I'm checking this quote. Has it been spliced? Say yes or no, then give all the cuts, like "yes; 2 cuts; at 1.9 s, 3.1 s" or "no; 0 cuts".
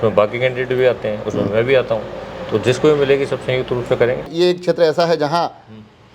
yes; 1 cut; at 4.3 s